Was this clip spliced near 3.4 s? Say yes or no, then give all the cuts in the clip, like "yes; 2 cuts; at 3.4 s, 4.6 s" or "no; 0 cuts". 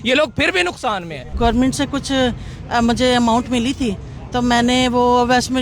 no; 1 cut; at 1.3 s